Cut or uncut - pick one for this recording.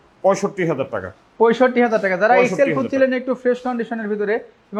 uncut